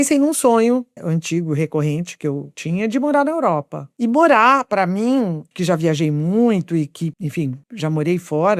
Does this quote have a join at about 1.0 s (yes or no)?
yes